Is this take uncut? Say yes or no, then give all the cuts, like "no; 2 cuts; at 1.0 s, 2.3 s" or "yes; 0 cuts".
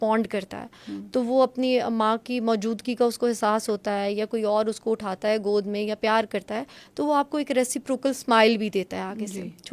yes; 0 cuts